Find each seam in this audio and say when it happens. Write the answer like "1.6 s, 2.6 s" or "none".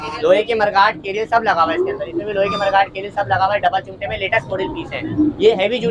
none